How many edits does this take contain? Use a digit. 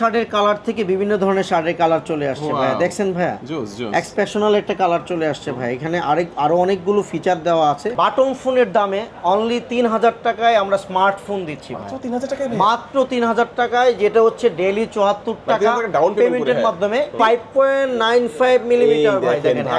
2